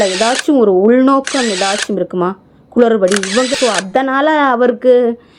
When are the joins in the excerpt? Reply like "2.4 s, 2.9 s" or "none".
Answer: 3.5 s